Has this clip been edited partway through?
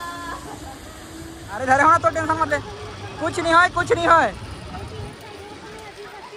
yes; 1 cut; at 1.6 s

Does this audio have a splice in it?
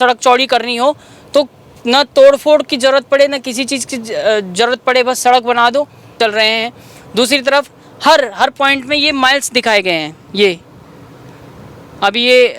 yes; 1 cut; at 6.2 s

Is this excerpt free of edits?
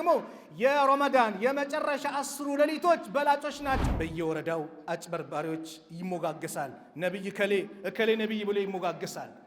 no; 1 cut; at 3.8 s

